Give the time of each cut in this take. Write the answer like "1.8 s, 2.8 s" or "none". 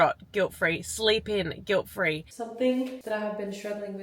2.3 s, 3.0 s